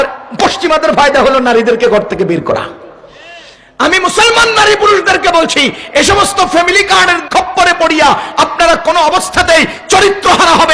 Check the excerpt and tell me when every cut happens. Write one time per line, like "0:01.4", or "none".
0:07.2